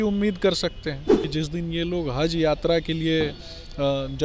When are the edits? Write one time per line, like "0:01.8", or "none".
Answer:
0:01.1